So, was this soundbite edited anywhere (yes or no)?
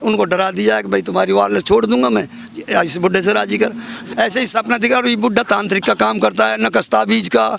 yes